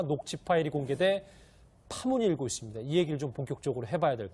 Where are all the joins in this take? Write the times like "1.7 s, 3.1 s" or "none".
none